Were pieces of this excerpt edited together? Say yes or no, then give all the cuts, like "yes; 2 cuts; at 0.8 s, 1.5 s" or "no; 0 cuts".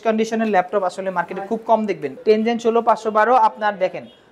yes; 1 cut; at 2.1 s